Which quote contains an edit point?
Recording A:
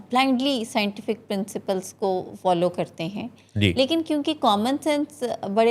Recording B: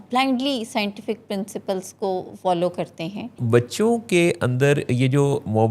B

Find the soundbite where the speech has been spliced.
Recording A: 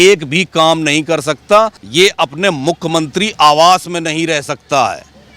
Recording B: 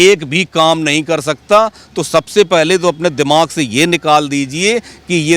A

